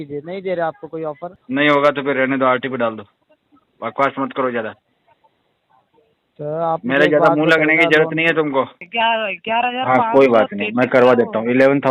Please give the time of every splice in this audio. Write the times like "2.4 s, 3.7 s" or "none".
1.3 s, 8.8 s